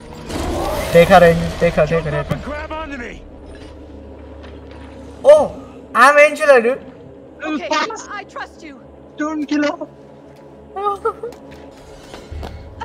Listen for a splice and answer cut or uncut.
cut